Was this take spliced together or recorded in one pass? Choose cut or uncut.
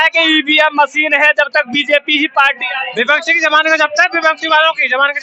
uncut